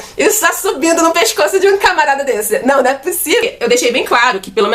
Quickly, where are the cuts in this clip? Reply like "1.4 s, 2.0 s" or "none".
3.4 s